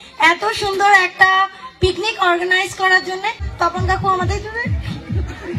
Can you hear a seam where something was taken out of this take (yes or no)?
yes